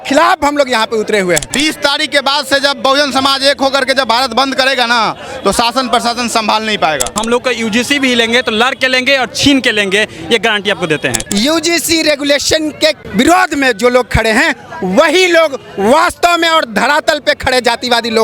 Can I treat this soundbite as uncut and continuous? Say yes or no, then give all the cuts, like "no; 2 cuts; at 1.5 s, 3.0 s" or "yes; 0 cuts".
no; 4 cuts; at 1.5 s, 7.2 s, 11.2 s, 13.0 s